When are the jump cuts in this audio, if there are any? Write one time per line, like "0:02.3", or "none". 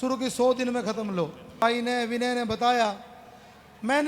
0:01.6